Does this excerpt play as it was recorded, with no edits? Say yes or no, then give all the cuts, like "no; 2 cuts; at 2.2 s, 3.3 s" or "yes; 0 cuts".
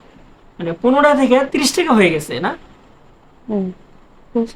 yes; 0 cuts